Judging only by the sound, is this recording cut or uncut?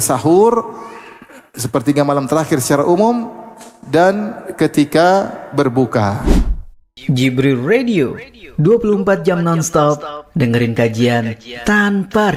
cut